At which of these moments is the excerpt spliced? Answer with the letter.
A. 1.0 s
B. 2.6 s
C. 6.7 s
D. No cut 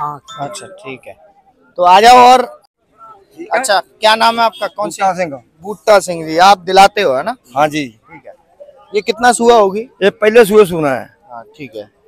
B